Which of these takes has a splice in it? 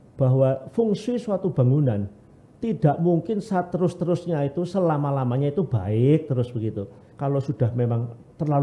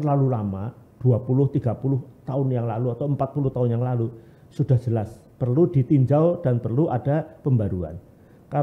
first; 1 cut; at 7.0 s

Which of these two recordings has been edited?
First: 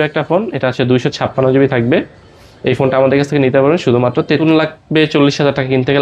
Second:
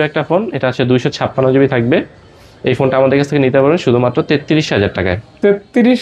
first; 1 cut; at 4.4 s

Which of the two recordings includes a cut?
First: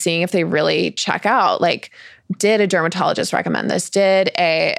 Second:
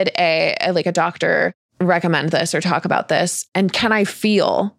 second; 2 cuts; at 1.6 s, 3.4 s

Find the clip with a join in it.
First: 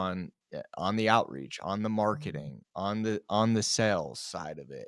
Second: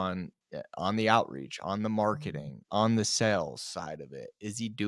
second; 1 cut; at 2.6 s

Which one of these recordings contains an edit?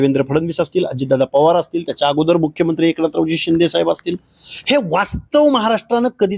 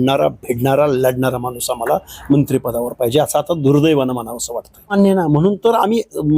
second; 1 cut; at 4.9 s

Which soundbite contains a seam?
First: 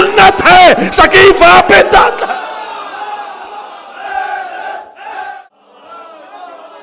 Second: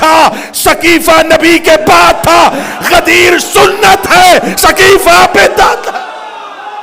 first; 1 cut; at 5.5 s

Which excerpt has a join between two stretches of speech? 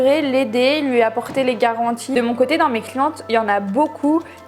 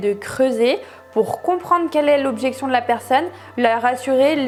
first; 1 cut; at 2.1 s

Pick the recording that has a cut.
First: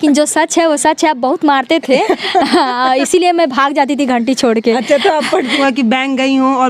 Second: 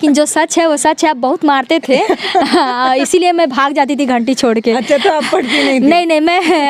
first; 1 cut; at 5.6 s

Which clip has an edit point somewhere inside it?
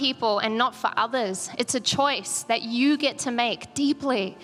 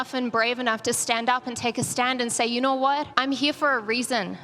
second; 1 cut; at 3.1 s

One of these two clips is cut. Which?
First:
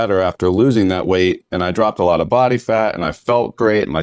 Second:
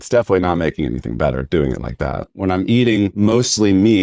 second; 2 cuts; at 2.3 s, 3.1 s

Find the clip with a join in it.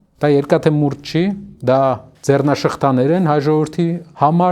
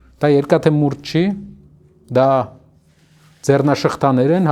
first; 2 cuts; at 1.5 s, 2.1 s

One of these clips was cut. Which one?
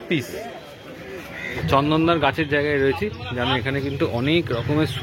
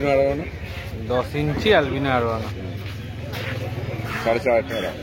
first; 1 cut; at 1.6 s

